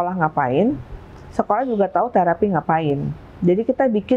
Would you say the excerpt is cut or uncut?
uncut